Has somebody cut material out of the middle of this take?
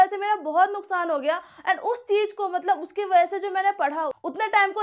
no; 0 cuts

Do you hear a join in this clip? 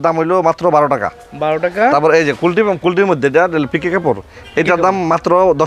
no; 0 cuts

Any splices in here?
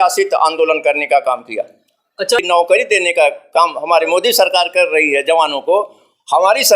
yes; 1 cut; at 2.4 s

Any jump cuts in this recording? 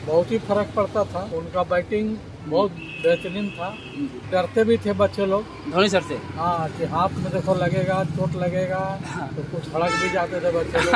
yes; 3 cuts; at 1.4 s, 4.2 s, 9.4 s

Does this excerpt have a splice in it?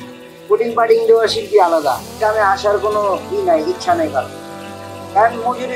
yes; 1 cut; at 2.2 s

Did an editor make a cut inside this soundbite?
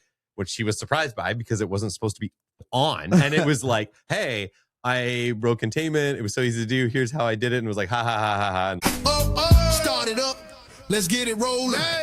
yes; 2 cuts; at 2.6 s, 8.8 s

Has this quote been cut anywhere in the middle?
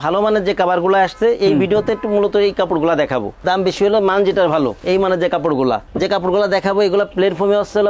no; 0 cuts

